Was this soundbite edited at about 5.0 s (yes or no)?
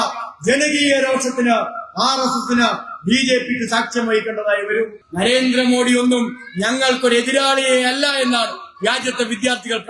yes